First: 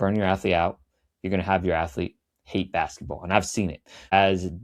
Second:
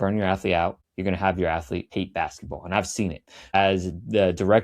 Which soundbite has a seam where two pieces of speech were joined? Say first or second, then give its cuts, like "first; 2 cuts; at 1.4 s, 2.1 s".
second; 2 cuts; at 0.9 s, 1.9 s